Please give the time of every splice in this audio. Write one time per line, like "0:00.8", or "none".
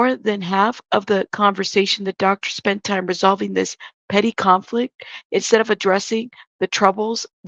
none